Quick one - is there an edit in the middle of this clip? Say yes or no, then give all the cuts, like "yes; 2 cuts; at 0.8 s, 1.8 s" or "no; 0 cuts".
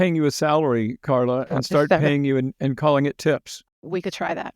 yes; 1 cut; at 3.5 s